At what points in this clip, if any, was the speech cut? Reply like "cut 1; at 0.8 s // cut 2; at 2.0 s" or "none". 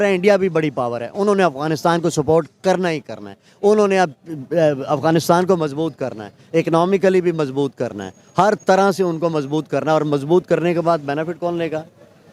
none